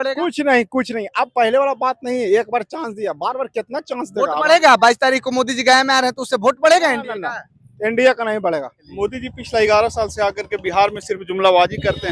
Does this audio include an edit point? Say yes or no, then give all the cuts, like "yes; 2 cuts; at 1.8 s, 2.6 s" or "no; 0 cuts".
yes; 1 cut; at 8.8 s